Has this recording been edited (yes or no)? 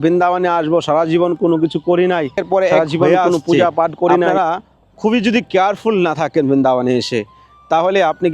yes